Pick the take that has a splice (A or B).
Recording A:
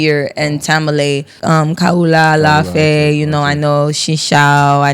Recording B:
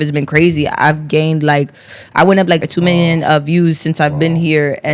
A